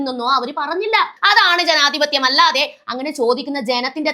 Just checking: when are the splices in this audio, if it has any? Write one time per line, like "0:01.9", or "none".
0:01.1

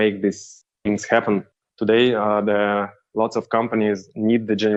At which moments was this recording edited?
none

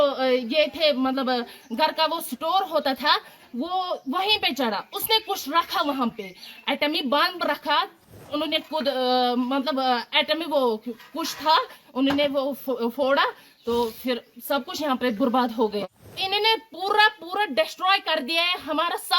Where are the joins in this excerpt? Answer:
0:08.2
0:15.8

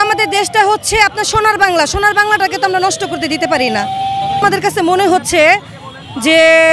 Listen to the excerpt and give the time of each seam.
0:04.4

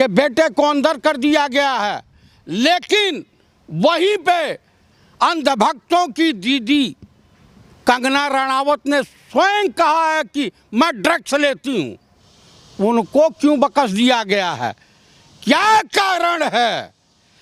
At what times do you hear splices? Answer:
none

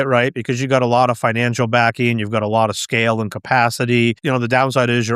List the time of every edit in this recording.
0:04.2

